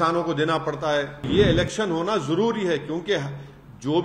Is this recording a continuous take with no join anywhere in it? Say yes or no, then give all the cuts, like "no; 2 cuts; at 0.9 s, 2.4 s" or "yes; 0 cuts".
no; 1 cut; at 1.3 s